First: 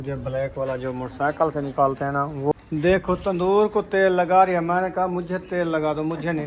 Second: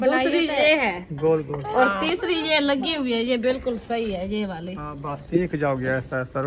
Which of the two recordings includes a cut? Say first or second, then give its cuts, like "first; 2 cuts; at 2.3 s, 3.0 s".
first; 1 cut; at 2.5 s